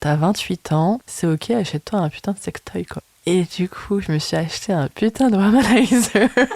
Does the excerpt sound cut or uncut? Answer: cut